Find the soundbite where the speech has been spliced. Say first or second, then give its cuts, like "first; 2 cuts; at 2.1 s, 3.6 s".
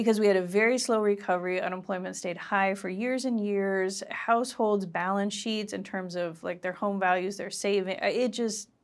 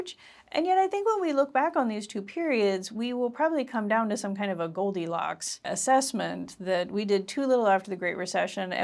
second; 1 cut; at 5.7 s